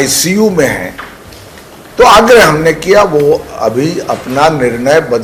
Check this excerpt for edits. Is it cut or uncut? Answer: uncut